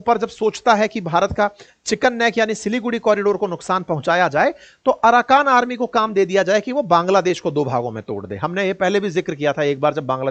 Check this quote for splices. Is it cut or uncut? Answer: uncut